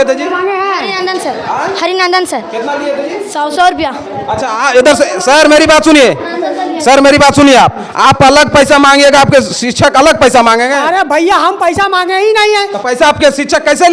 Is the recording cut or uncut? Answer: uncut